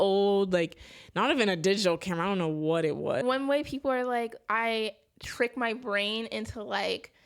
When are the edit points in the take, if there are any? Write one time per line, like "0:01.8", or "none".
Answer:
0:03.2